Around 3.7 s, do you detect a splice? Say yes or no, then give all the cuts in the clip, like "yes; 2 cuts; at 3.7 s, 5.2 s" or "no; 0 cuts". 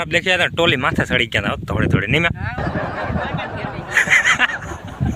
no; 0 cuts